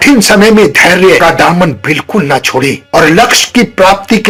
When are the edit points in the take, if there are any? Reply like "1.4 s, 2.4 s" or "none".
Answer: none